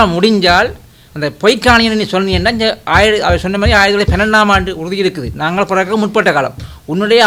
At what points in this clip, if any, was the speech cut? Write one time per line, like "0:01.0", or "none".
none